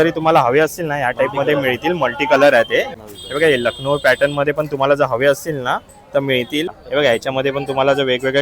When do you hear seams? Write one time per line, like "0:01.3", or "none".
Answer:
0:02.9
0:06.8